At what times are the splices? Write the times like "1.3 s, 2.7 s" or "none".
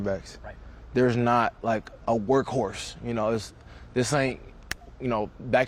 none